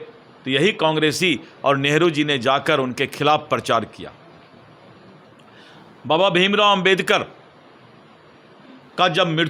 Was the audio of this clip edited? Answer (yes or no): no